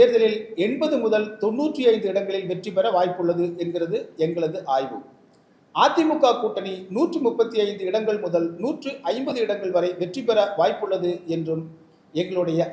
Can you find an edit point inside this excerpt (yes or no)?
no